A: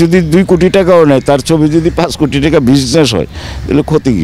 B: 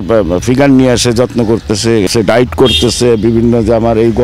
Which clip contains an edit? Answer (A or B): B